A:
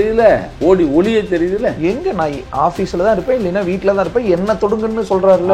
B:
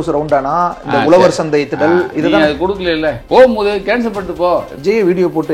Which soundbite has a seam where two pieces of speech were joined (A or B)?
B